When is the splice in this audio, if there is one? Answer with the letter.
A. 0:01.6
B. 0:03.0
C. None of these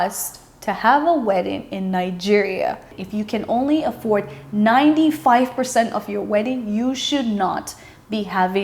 B